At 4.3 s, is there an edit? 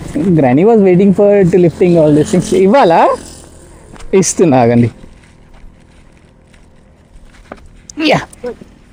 no; 0 cuts

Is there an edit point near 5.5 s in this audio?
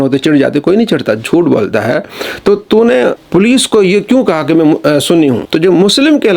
yes; 2 cuts; at 3.2 s, 5.5 s

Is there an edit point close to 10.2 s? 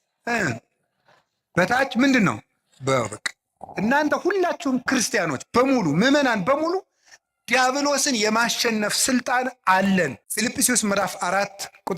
yes; 1 cut; at 10.2 s

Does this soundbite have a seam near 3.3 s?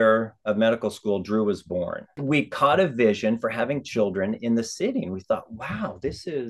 no; 1 cut; at 2.1 s

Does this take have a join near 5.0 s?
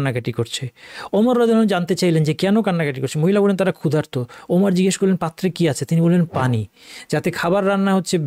no; 0 cuts

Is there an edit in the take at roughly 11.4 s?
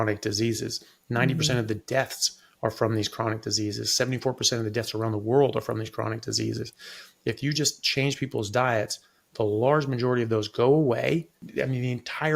yes; 1 cut; at 11.4 s

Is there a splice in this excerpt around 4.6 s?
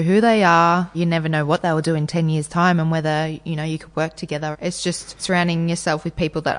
yes; 2 cuts; at 0.9 s, 4.6 s

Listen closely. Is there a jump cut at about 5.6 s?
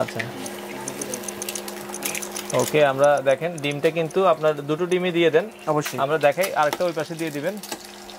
no; 0 cuts

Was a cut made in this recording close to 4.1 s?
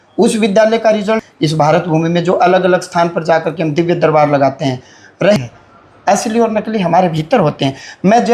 no; 2 cuts; at 1.3 s, 5.4 s

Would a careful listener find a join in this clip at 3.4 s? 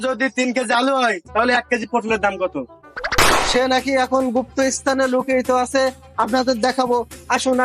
yes; 1 cut; at 3.4 s

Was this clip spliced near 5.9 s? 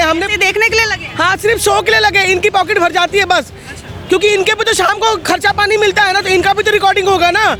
no; 0 cuts

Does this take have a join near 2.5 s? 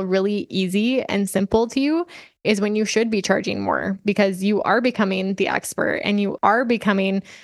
no; 1 cut; at 6.4 s

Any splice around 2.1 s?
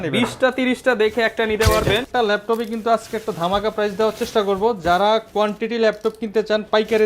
yes; 1 cut; at 2.1 s

